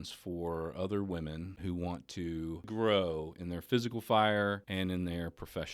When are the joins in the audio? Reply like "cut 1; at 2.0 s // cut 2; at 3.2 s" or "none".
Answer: cut 1; at 1.5 s // cut 2; at 2.7 s // cut 3; at 4.6 s

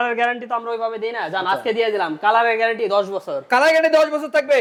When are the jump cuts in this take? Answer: none

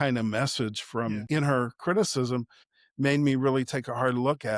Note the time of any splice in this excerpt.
cut 1; at 1.2 s // cut 2; at 2.7 s

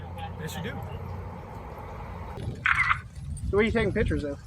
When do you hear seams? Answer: cut 1; at 2.4 s

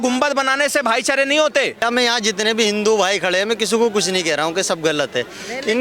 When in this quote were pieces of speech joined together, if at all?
cut 1; at 1.8 s

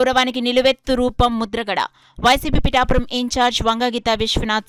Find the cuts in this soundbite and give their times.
none

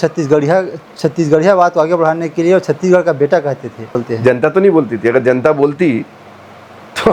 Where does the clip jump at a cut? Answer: cut 1; at 4.0 s

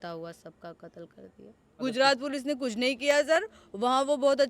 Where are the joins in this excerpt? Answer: cut 1; at 1.8 s

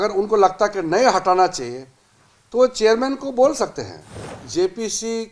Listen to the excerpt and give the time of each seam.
cut 1; at 4.4 s

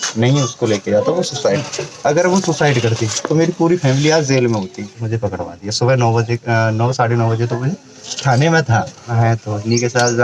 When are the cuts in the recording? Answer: cut 1; at 1.6 s // cut 2; at 5.0 s // cut 3; at 9.1 s

